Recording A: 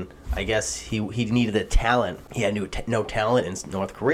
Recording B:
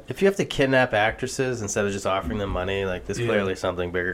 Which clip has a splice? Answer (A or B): A